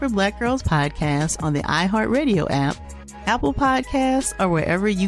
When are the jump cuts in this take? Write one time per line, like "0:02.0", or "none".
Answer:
none